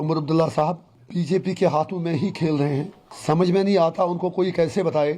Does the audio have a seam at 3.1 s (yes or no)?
yes